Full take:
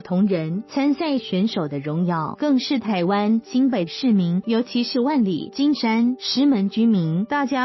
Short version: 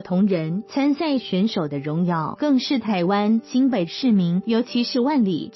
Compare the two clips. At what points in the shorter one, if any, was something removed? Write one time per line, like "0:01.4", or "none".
none

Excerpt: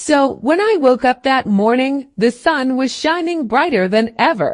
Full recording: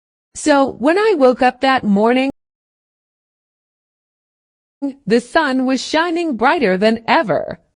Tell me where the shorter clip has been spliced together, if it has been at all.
0:01.9

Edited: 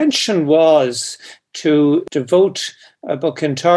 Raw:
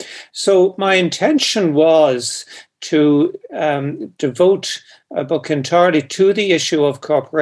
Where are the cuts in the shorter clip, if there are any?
0:02.1

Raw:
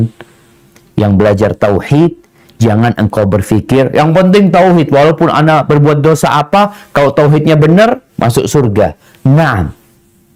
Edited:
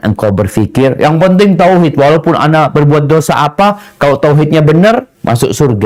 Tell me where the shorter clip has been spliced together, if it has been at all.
none

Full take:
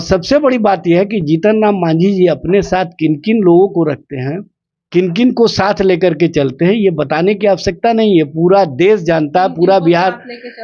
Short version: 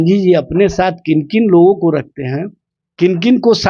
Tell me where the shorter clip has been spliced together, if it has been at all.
none

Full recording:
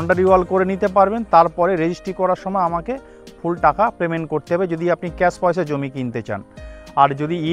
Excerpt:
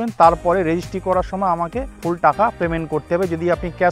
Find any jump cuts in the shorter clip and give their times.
0:01.9

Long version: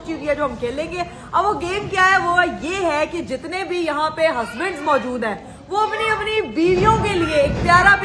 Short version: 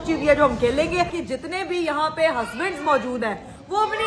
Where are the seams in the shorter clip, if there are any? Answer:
0:01.2

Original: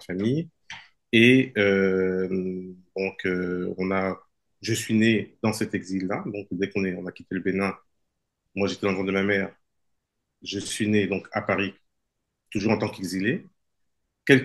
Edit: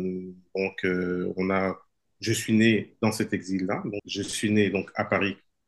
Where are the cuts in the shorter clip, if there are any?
0:04.0

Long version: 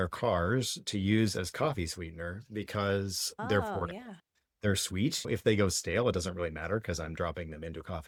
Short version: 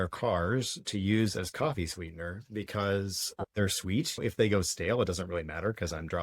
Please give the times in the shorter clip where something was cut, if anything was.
0:03.2

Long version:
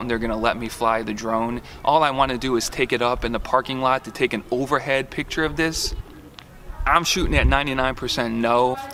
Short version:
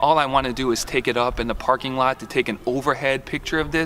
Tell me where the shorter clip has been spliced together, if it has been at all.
none

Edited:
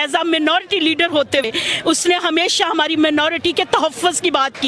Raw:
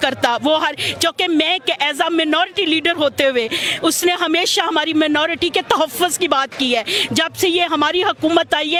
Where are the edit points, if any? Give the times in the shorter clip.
0:01.4

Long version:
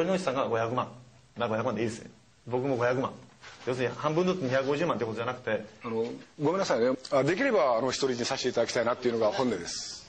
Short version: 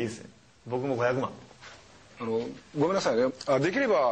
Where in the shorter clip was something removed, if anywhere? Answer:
0:01.9

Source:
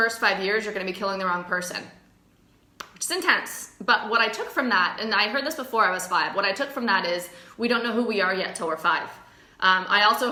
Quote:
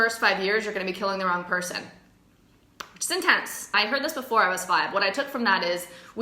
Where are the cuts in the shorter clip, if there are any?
0:03.7

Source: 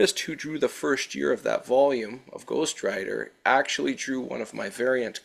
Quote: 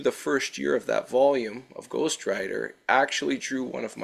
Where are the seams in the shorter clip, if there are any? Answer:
none

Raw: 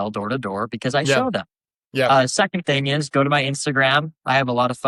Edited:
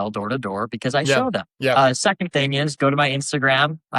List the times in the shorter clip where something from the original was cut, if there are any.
0:01.5

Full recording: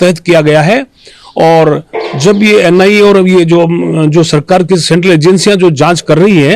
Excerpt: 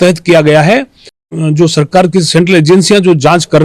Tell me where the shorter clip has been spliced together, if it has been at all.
0:01.3

